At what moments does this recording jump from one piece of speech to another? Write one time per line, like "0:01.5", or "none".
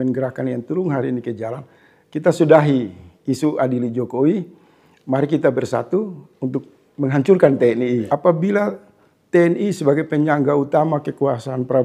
0:08.1